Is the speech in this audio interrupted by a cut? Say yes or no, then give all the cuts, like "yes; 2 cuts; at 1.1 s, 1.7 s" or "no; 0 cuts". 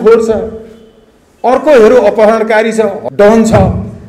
yes; 1 cut; at 3.0 s